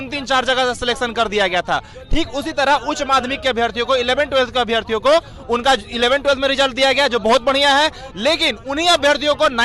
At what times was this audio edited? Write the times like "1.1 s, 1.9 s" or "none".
none